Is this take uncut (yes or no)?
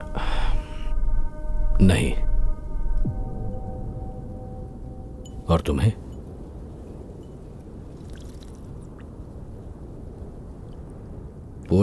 yes